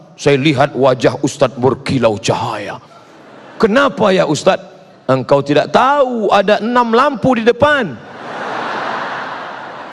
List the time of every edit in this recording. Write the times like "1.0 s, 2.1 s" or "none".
none